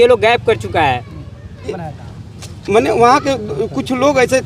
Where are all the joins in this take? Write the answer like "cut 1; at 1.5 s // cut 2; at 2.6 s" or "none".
cut 1; at 1.7 s